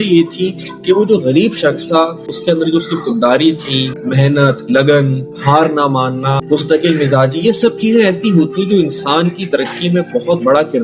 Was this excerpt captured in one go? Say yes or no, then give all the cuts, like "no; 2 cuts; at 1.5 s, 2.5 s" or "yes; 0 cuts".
no; 3 cuts; at 2.2 s, 3.9 s, 6.4 s